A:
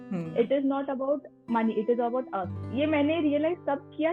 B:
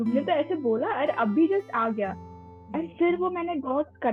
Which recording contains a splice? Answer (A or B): A